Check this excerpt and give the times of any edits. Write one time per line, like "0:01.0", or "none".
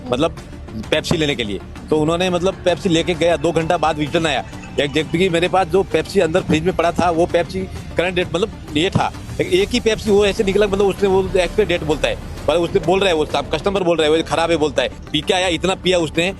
0:15.0